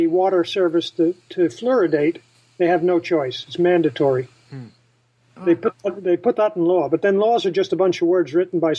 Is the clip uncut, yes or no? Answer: no